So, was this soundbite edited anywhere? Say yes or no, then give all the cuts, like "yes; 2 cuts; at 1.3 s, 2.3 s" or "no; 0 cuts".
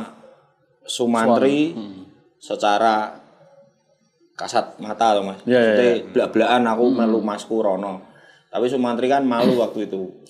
no; 0 cuts